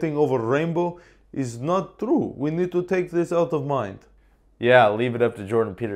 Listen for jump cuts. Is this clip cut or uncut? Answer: uncut